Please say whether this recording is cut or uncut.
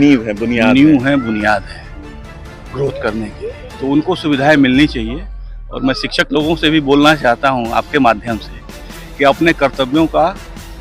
uncut